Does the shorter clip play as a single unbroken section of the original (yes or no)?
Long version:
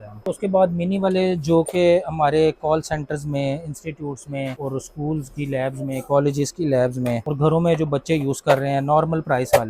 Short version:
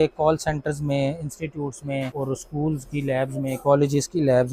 yes